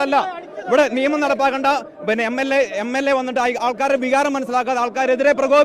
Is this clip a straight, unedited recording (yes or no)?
yes